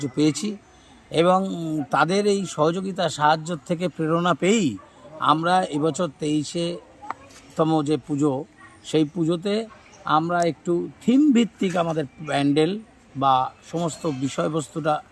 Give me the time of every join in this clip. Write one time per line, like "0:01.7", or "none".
none